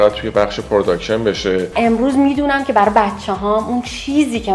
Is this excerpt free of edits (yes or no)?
no